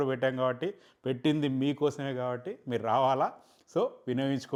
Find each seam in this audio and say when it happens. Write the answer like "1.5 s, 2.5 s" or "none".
none